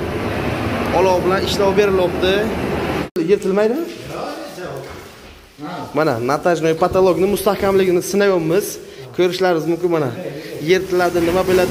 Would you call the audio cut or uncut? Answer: cut